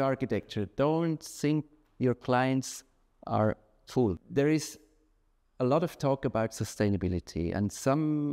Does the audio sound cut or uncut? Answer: cut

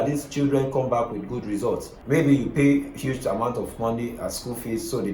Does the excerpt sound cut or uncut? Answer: cut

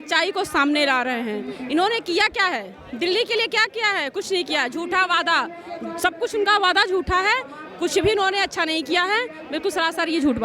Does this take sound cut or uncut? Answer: uncut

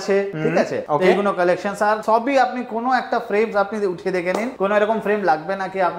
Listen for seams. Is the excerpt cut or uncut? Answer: uncut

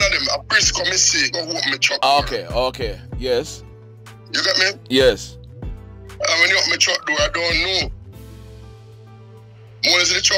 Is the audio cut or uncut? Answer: uncut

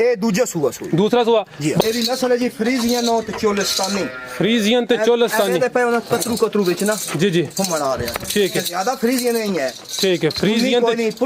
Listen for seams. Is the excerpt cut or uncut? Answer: cut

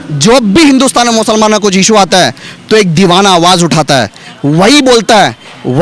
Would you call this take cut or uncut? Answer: uncut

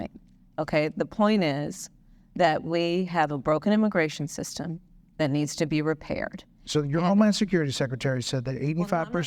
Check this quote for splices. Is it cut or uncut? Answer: uncut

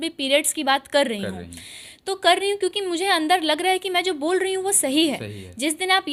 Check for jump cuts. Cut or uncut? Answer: uncut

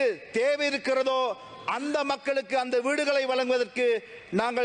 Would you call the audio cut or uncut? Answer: uncut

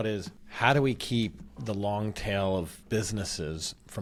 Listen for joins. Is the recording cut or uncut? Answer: uncut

